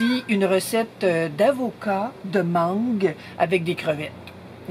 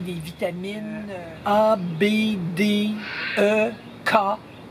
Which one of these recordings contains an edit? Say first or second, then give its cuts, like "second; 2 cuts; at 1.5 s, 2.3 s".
second; 1 cut; at 1.0 s